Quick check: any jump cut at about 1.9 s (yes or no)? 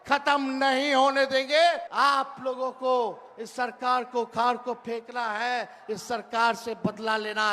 yes